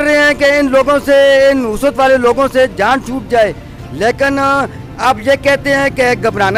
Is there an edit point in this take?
no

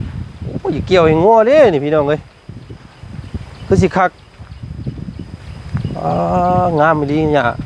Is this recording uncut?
yes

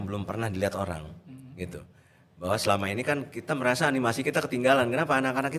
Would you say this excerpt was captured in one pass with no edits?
yes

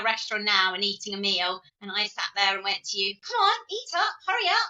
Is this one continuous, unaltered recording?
no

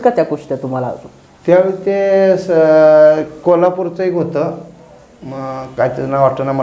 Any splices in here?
no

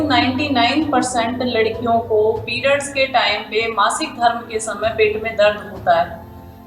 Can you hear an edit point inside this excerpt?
no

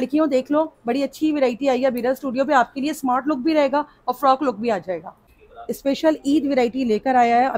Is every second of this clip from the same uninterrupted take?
no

